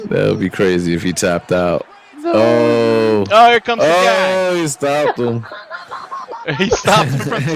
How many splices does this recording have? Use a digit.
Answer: 0